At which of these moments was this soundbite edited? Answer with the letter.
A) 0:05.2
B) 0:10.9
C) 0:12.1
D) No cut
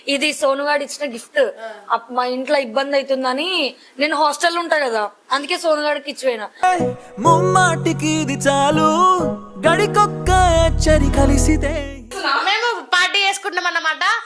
C